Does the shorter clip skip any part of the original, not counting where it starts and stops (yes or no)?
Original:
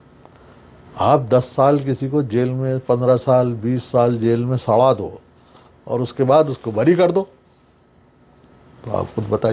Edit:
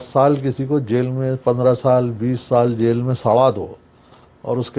no